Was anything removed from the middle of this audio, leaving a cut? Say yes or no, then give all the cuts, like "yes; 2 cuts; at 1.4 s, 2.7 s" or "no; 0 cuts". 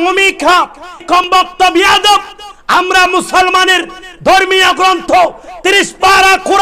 yes; 1 cut; at 1.2 s